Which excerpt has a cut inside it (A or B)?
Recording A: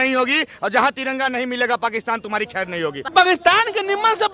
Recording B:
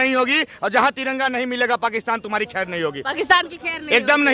A